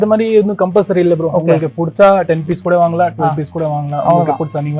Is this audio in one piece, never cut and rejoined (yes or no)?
yes